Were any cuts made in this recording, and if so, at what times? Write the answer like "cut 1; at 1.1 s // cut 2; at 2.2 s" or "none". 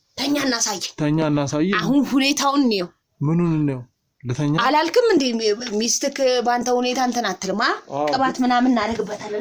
none